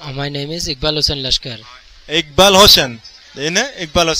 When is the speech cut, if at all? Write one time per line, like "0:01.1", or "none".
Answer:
none